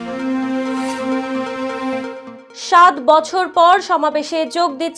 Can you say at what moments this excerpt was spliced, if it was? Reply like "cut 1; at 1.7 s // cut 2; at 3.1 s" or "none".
none

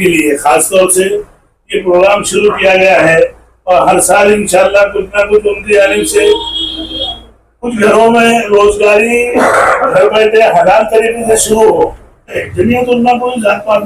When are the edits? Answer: cut 1; at 12.4 s

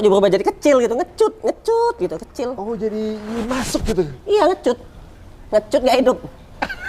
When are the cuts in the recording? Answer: none

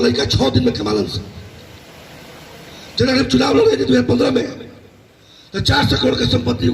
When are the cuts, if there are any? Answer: cut 1; at 1.5 s

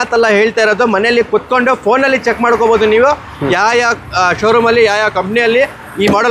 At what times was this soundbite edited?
none

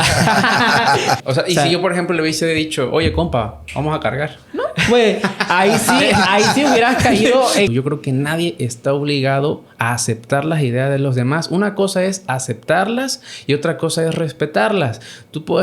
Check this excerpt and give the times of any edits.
cut 1; at 1.2 s // cut 2; at 7.7 s

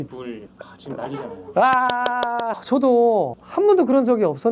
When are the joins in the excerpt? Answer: cut 1; at 2.6 s

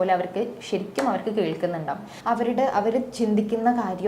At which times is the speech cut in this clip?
cut 1; at 2.1 s

